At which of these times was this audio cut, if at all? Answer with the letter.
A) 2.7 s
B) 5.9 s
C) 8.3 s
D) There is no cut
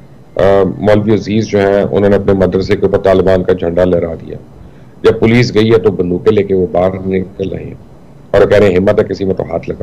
D